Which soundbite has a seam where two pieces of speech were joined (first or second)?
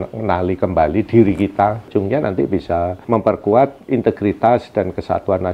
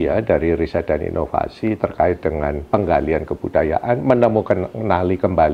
first